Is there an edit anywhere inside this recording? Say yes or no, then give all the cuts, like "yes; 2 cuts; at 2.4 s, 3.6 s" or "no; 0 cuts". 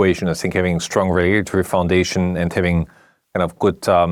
no; 0 cuts